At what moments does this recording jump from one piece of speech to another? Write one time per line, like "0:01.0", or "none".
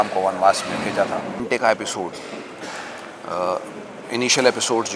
0:01.4